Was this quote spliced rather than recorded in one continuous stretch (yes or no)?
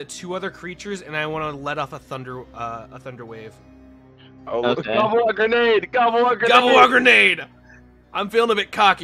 no